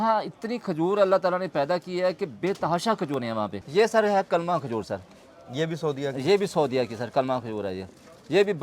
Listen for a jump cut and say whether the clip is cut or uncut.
cut